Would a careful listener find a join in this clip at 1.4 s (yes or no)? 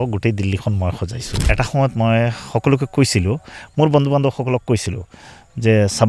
yes